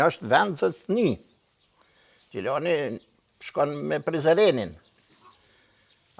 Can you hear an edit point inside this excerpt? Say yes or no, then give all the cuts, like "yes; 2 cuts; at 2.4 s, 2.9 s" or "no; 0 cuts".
no; 0 cuts